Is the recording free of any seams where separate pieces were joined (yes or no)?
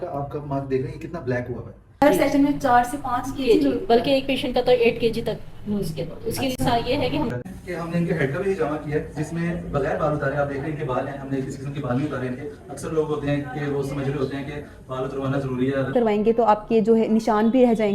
no